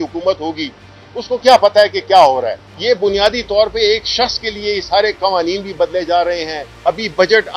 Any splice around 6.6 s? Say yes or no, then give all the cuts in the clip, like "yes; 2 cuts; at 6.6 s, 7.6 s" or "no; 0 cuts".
yes; 2 cuts; at 2.6 s, 6.6 s